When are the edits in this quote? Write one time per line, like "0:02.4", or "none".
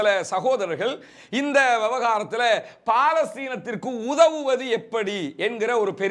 none